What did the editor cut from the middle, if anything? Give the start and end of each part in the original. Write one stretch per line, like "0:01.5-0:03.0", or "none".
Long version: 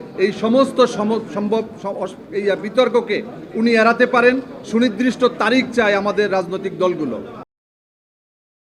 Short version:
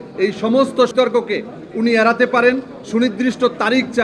0:00.9-0:02.7